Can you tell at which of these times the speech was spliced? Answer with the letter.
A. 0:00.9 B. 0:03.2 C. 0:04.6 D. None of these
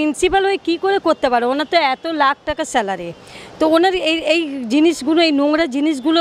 D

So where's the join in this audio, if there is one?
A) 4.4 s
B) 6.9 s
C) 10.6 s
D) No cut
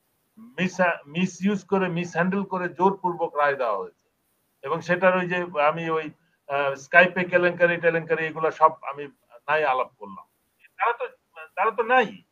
C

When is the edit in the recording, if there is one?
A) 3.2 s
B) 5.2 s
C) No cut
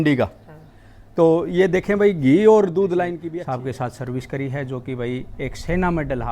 A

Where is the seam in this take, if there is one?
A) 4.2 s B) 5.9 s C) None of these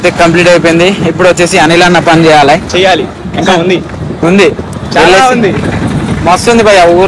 C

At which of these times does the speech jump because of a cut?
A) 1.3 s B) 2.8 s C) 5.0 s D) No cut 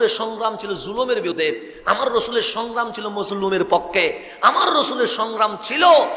A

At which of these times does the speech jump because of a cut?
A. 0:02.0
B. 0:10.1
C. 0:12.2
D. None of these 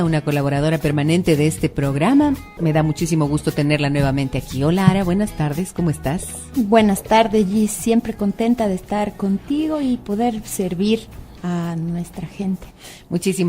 A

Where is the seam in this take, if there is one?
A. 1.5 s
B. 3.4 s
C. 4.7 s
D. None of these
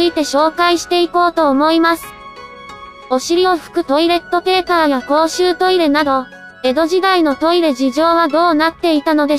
C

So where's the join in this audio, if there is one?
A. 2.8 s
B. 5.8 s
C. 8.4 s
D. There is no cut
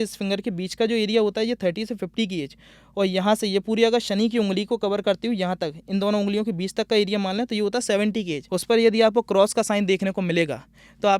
C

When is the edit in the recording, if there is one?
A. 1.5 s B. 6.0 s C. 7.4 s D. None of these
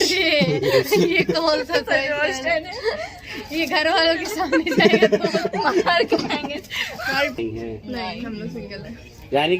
C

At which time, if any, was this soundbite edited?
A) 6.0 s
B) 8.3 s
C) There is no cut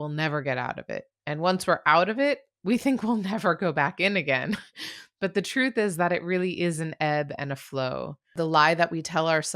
B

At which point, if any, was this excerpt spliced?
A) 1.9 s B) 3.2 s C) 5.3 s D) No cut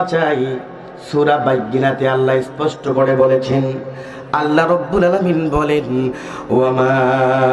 D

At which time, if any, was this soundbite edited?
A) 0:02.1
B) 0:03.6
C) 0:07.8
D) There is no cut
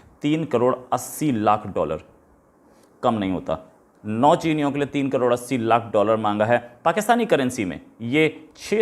D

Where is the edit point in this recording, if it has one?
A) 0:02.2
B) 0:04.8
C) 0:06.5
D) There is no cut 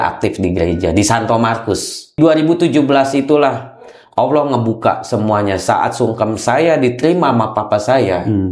A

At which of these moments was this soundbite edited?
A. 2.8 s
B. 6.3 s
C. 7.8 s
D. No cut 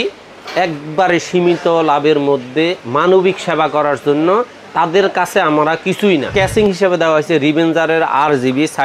B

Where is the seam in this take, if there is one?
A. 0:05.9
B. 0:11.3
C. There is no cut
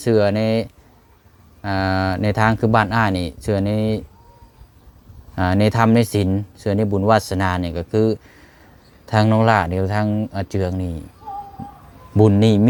C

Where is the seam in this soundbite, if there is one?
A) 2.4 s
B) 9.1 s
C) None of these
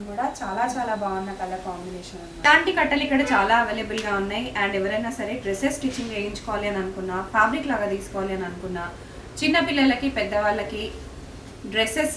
A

